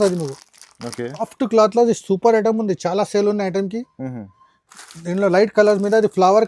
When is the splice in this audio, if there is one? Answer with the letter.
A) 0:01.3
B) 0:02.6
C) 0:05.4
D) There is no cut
A